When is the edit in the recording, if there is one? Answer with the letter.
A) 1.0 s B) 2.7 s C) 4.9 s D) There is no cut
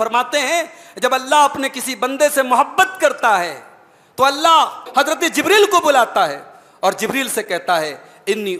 C